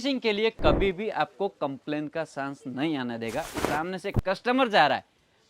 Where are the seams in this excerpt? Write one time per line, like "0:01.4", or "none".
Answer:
0:03.6